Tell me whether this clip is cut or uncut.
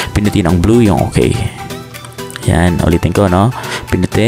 uncut